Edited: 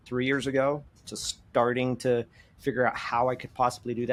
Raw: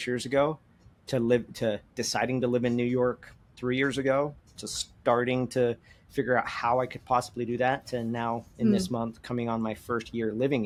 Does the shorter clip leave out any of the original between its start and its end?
no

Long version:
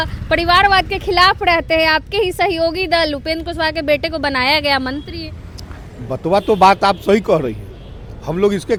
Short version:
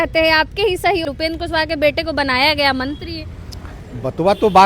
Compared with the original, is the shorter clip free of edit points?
no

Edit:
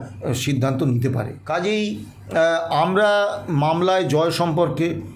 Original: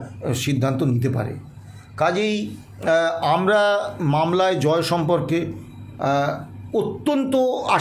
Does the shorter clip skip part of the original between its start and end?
yes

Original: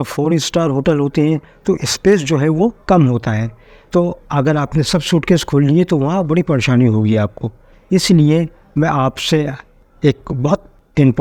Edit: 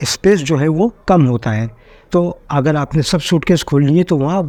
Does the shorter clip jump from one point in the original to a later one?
no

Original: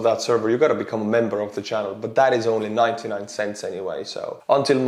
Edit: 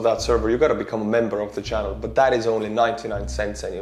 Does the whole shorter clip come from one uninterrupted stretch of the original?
yes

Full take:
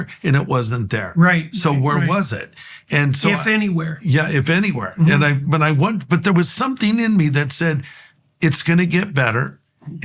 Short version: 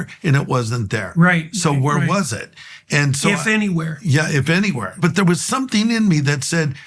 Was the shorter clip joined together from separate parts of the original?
yes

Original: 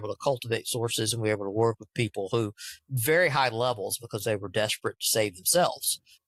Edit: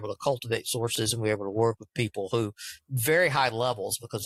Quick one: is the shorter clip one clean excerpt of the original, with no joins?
yes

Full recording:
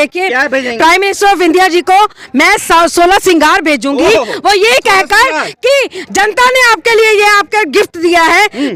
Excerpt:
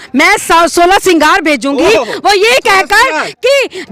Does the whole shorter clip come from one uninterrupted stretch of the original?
yes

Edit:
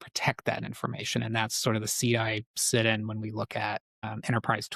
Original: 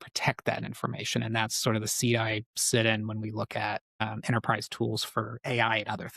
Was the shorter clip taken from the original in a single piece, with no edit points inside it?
yes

